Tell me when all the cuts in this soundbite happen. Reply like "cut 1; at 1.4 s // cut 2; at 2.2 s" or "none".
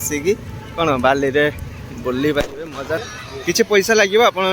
cut 1; at 3.0 s